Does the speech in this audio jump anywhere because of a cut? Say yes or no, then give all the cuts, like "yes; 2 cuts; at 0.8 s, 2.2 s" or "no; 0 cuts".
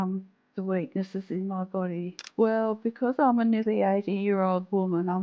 yes; 1 cut; at 2.2 s